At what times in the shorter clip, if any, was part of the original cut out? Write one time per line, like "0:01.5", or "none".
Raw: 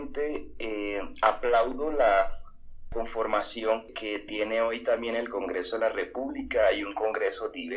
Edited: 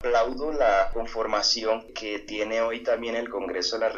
0:00.9